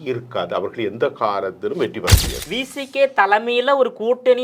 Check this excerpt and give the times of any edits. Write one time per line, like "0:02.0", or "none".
0:02.4